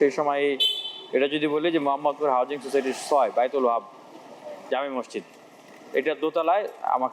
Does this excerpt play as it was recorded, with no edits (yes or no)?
yes